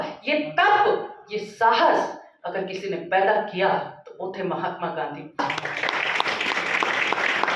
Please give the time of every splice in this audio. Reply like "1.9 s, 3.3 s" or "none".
5.4 s